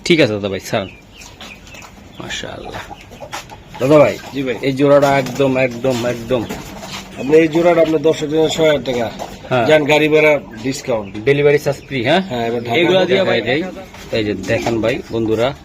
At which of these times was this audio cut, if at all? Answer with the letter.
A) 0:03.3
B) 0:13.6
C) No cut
B